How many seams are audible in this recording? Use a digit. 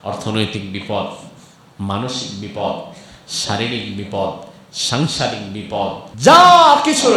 1